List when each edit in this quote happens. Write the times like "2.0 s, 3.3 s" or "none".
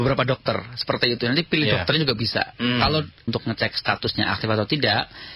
3.3 s